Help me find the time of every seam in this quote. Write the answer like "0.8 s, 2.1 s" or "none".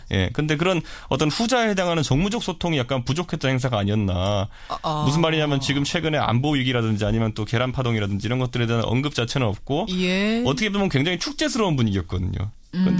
0.9 s